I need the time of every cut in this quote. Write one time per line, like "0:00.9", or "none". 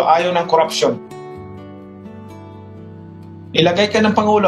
none